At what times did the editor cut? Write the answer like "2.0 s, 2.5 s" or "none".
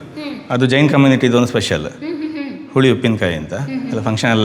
none